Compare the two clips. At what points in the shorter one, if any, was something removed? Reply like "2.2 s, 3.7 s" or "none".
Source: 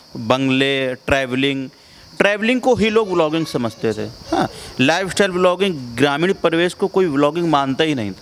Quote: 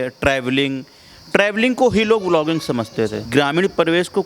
3.2 s